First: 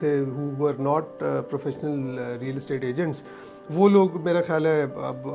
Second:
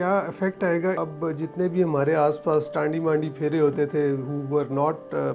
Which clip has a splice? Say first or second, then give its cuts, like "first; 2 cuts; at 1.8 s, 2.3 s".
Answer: second; 1 cut; at 1.0 s